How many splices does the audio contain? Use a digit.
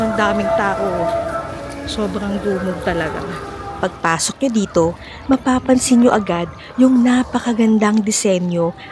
0